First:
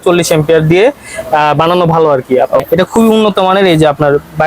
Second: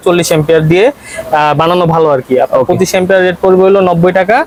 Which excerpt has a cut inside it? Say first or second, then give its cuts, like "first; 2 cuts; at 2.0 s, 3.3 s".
first; 1 cut; at 2.6 s